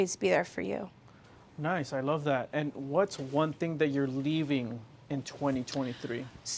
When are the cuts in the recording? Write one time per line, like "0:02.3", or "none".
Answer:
none